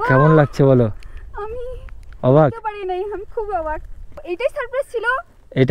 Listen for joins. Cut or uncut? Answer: cut